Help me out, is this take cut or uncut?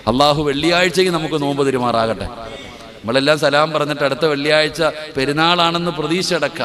uncut